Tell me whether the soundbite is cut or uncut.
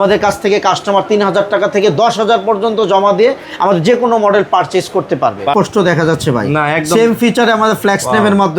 cut